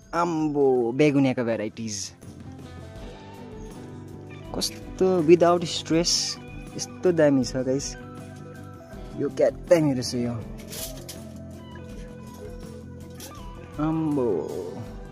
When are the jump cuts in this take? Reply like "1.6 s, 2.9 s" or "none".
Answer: none

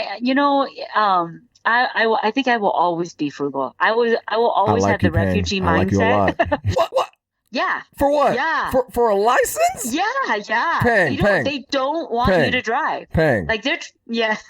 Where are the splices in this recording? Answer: 6.7 s

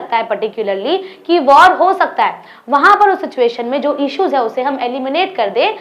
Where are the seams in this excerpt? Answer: none

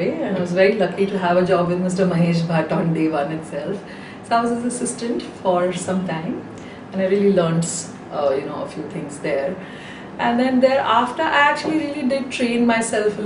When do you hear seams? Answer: 3.8 s

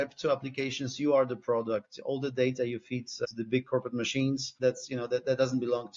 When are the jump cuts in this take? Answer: 3.2 s, 4.5 s

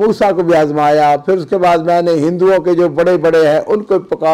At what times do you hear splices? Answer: none

